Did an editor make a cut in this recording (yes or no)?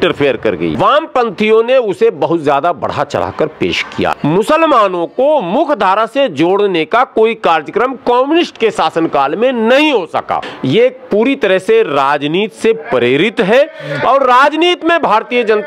yes